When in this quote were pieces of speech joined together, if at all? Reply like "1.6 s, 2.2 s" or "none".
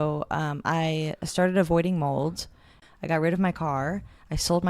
2.8 s